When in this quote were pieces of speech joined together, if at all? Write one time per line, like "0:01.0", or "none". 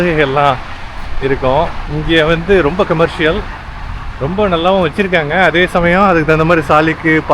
none